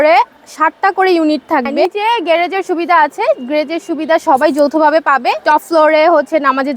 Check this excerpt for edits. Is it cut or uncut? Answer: cut